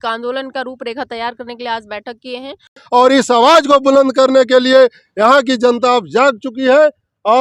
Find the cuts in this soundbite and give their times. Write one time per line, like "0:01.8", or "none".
0:02.8